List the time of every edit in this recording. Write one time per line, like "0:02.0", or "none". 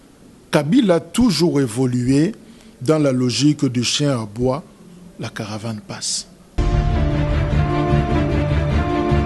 0:06.4